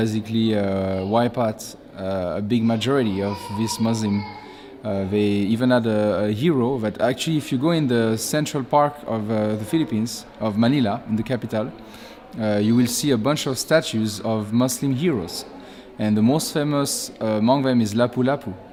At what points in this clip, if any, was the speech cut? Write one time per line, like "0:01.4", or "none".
none